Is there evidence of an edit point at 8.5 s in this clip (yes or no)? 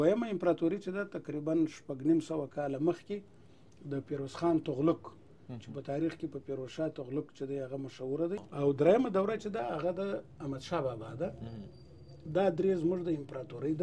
yes